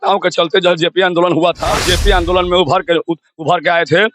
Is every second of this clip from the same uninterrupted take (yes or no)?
no